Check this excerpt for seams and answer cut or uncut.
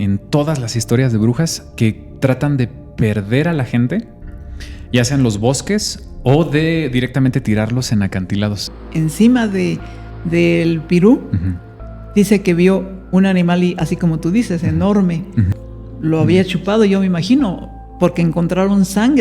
cut